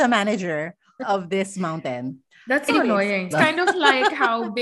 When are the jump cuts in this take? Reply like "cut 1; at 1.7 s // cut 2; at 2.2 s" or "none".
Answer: cut 1; at 0.9 s // cut 2; at 3.3 s